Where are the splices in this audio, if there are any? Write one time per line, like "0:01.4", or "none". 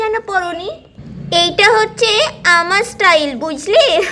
none